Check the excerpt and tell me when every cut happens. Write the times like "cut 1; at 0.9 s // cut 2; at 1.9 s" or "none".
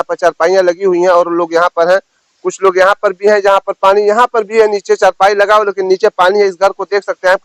none